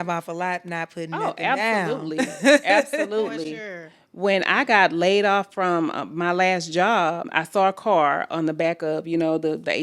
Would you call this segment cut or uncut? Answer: cut